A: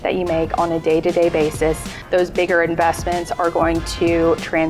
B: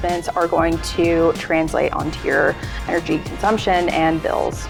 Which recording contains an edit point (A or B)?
A